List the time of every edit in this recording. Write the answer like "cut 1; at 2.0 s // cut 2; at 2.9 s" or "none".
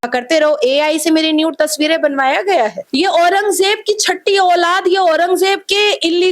cut 1; at 2.8 s